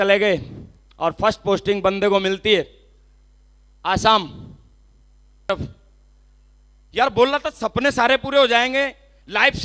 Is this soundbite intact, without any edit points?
no; 1 cut; at 5.5 s

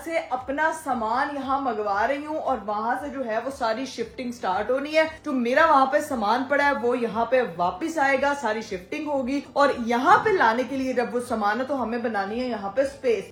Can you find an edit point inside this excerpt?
no; 0 cuts

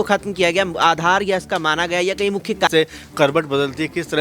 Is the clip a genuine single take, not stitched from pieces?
no; 1 cut; at 2.7 s

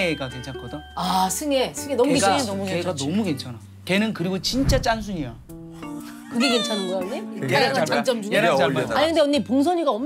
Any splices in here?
yes; 1 cut; at 8.9 s

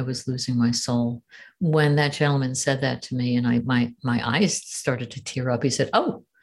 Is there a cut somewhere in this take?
no; 0 cuts

